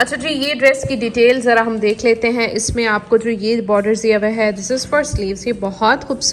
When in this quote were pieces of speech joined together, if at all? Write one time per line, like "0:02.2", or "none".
none